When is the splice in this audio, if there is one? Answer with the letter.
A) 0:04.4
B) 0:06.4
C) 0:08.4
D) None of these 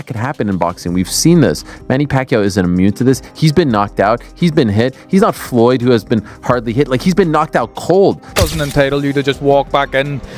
C